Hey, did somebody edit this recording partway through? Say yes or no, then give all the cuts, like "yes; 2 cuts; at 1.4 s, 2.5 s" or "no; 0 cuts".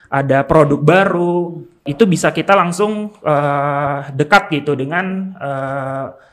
yes; 1 cut; at 1.9 s